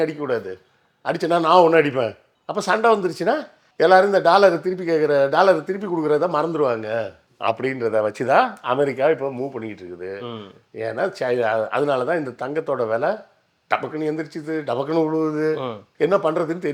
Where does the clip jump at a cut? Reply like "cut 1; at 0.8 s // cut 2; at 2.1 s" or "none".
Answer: none